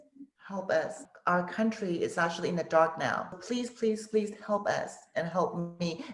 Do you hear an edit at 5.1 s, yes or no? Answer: no